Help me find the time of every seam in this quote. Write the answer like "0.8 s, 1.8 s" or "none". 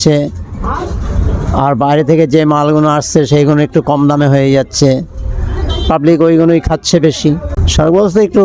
7.5 s